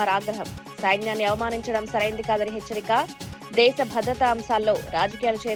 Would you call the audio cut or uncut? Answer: uncut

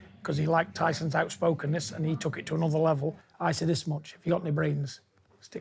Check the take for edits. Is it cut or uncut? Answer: cut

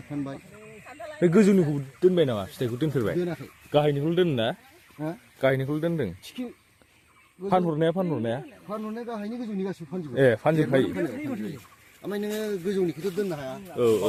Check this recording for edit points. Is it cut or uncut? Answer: uncut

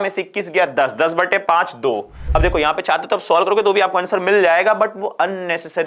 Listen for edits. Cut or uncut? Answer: cut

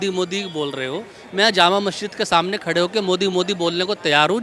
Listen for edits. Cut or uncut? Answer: uncut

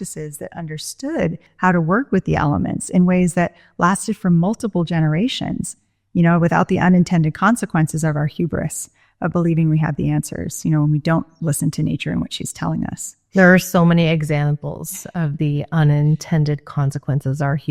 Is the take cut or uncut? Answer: cut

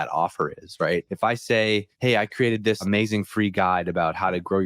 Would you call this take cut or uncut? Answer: cut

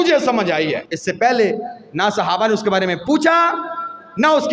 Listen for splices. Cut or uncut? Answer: cut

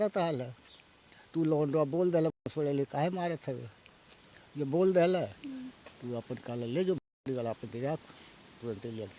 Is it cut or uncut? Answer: uncut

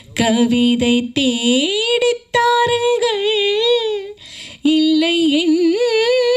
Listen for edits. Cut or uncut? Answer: uncut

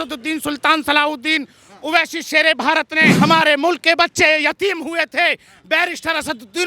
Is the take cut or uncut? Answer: cut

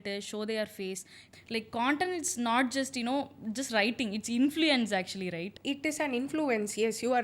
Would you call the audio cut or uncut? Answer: cut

